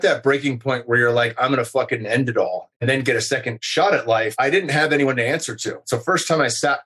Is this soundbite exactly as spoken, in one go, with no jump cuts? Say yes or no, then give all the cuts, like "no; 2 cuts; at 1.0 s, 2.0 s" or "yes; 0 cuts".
no; 4 cuts; at 2.6 s, 3.6 s, 4.3 s, 5.9 s